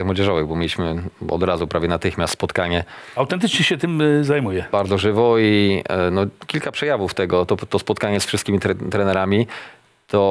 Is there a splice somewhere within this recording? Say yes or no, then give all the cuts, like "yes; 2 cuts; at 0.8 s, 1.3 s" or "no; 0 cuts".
no; 0 cuts